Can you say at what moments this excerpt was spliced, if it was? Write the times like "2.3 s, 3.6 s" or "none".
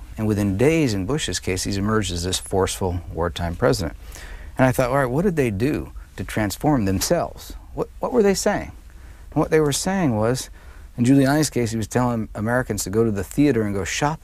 4.2 s